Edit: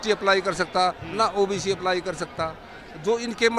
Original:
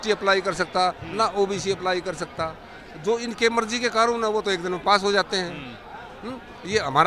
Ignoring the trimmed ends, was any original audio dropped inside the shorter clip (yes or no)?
no